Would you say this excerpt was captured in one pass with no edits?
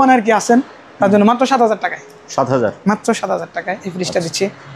yes; 0 cuts

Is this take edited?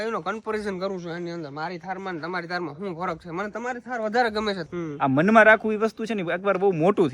yes; 1 cut; at 4.6 s

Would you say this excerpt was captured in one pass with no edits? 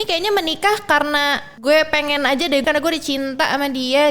no; 2 cuts; at 1.5 s, 2.6 s

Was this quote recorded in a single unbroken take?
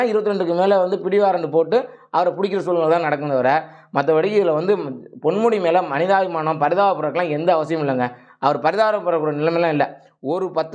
yes; 0 cuts

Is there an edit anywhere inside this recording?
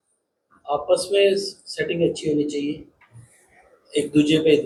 no; 0 cuts

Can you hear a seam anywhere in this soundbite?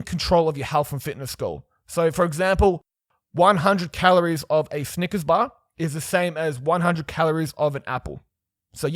no; 0 cuts

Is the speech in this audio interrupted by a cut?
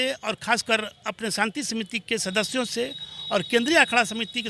no; 0 cuts

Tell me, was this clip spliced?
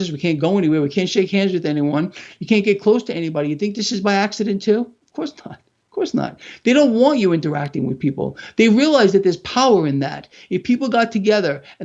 no; 0 cuts

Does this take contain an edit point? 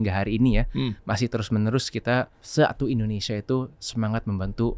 yes; 1 cut; at 2.4 s

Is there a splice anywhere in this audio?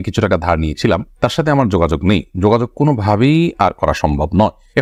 no; 0 cuts

